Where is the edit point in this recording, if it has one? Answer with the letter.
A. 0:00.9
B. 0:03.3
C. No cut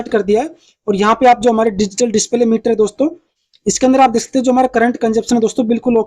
C